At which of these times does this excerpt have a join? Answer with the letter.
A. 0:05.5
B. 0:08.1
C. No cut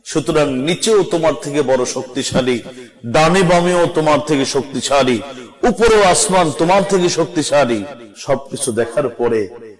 B